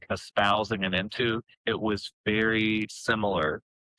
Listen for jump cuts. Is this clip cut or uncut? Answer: cut